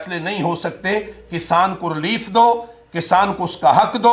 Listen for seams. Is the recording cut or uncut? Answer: uncut